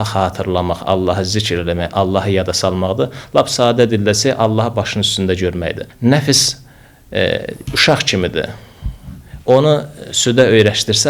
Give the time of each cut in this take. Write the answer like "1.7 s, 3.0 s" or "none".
5.8 s